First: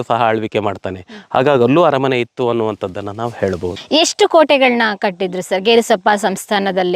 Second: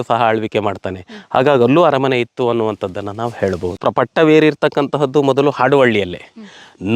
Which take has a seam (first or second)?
second